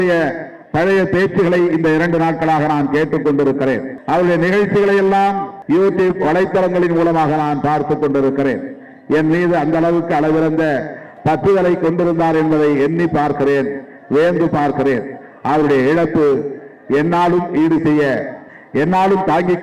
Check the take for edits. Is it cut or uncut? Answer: cut